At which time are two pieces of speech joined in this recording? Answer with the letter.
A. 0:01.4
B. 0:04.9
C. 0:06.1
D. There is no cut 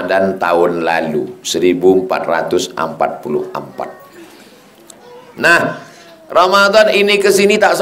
B